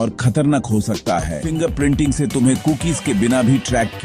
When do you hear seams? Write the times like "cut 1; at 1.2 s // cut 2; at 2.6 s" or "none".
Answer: cut 1; at 1.4 s

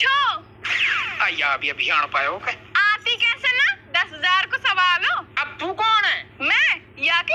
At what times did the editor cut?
none

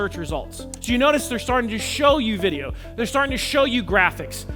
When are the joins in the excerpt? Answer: none

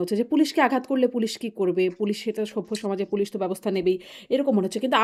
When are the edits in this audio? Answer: none

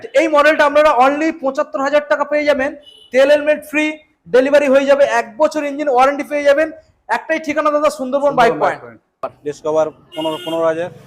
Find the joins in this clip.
cut 1; at 9.4 s

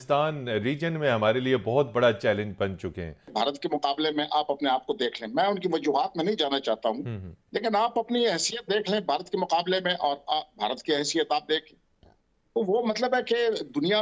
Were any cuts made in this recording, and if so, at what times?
cut 1; at 3.2 s

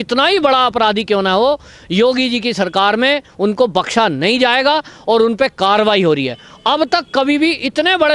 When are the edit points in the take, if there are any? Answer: none

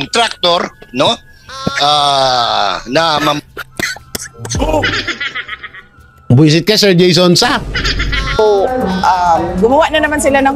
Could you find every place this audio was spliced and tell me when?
cut 1; at 8.4 s

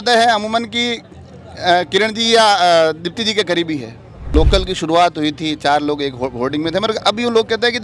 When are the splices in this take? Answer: cut 1; at 4.3 s

